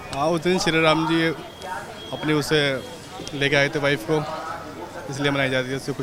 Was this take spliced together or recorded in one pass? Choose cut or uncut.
uncut